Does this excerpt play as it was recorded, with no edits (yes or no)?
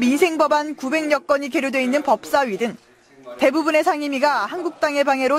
yes